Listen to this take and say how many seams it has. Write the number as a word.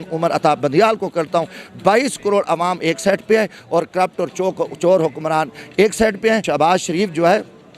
one